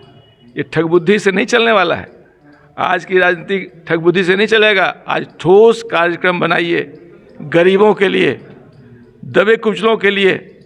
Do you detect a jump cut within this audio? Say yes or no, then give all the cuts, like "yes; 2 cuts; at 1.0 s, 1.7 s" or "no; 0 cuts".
no; 0 cuts